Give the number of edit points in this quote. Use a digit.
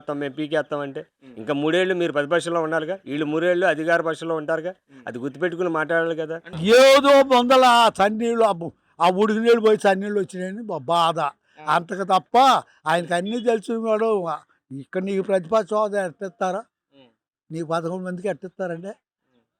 1